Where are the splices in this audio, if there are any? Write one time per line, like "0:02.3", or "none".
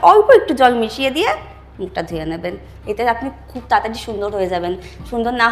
none